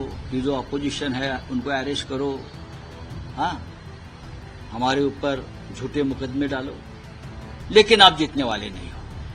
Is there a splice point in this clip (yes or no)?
no